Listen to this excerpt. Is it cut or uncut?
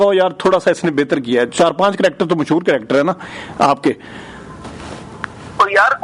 uncut